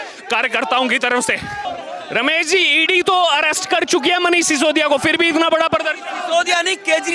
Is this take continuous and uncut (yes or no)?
no